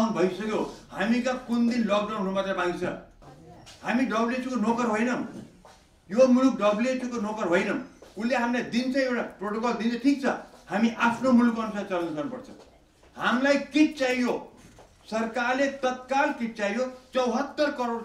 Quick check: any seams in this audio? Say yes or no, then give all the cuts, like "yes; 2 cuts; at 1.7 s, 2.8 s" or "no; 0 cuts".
yes; 1 cut; at 3.3 s